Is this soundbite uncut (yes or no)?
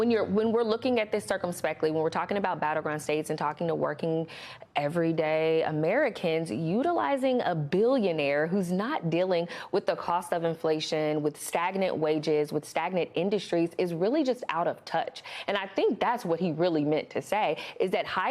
yes